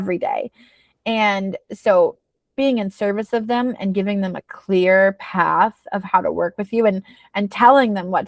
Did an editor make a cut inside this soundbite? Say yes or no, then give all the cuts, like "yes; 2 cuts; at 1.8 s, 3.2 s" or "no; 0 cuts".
no; 0 cuts